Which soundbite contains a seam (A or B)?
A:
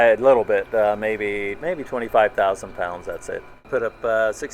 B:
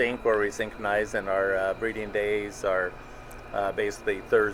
A